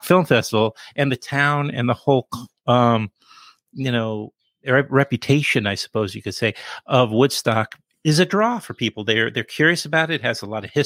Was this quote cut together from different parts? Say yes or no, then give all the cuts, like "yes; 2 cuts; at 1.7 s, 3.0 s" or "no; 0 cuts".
no; 0 cuts